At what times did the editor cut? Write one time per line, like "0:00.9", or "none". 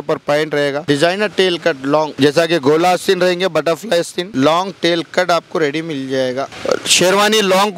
0:00.8
0:02.1
0:04.2
0:06.5